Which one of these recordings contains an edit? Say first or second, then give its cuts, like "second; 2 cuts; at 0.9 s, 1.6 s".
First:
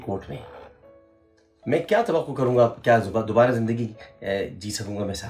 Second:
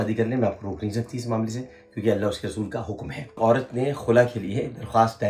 second; 1 cut; at 3.4 s